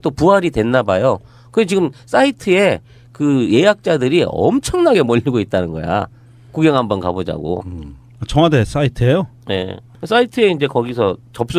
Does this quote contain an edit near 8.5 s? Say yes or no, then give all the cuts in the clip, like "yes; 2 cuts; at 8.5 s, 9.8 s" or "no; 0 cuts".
no; 1 cut; at 1.3 s